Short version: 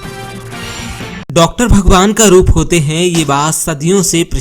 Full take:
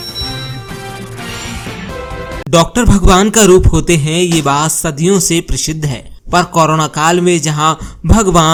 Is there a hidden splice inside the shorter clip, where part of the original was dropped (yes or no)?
yes